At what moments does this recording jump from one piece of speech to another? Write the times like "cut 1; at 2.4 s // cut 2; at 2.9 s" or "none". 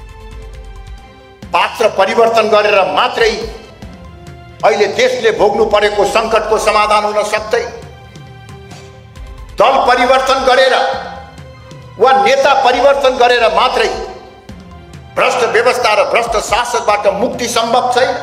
none